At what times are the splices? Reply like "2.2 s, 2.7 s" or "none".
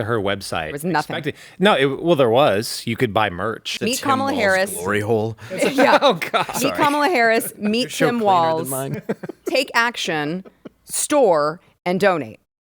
3.7 s